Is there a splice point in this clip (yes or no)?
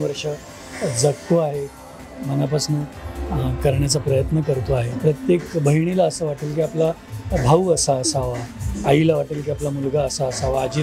yes